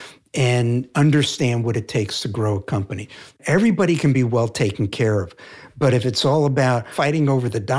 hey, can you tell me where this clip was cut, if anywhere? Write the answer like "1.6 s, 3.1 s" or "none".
0.9 s, 3.4 s, 6.9 s